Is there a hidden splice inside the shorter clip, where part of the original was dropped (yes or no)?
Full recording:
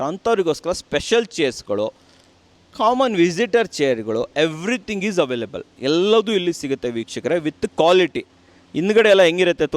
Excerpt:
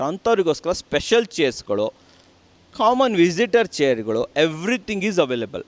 no